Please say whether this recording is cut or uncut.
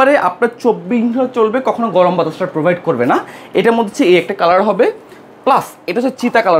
uncut